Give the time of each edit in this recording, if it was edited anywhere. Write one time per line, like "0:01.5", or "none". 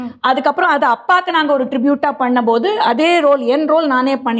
none